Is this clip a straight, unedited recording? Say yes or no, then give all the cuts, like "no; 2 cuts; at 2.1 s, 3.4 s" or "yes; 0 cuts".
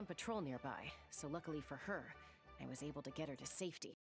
yes; 0 cuts